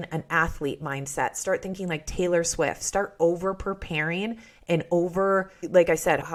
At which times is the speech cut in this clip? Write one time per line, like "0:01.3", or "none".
none